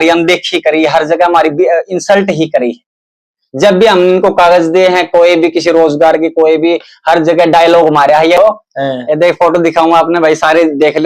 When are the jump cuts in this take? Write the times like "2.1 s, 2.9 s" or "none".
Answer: 8.4 s